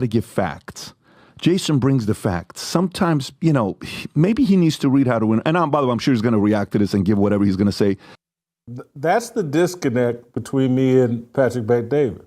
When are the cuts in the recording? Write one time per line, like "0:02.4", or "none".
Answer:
0:08.2